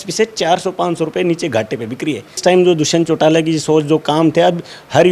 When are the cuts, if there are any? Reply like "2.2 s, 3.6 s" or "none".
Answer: 2.4 s